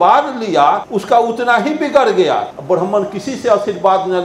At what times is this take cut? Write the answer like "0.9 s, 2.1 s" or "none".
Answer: 0.9 s, 2.5 s